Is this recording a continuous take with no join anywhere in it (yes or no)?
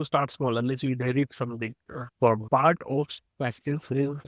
no